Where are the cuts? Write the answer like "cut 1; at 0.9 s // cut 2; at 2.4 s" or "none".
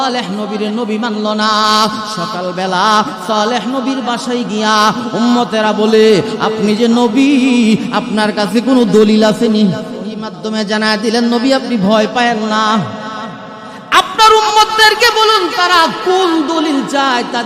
cut 1; at 10.3 s